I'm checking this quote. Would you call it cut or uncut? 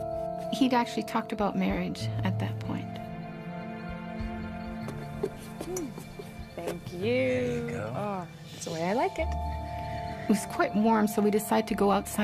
uncut